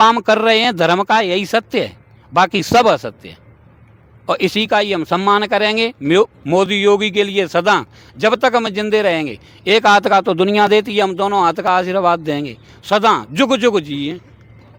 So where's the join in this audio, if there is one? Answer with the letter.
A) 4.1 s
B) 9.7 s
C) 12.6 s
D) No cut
D